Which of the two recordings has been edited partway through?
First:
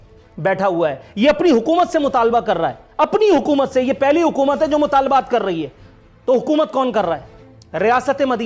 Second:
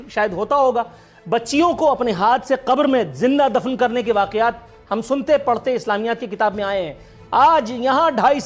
first; 1 cut; at 7.3 s

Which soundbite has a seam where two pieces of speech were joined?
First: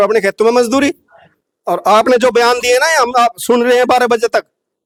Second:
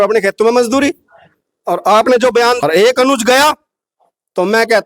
second; 1 cut; at 2.6 s

